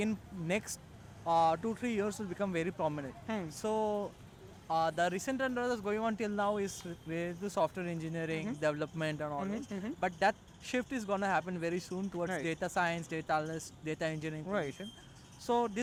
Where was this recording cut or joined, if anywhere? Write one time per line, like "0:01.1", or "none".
none